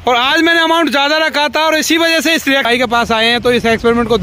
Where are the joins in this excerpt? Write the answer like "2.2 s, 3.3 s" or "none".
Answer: 2.7 s